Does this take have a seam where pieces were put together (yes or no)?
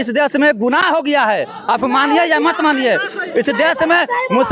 no